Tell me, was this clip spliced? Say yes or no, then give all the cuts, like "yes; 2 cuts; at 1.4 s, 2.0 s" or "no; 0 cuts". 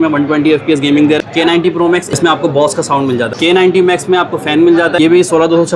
yes; 3 cuts; at 1.7 s, 3.3 s, 5.0 s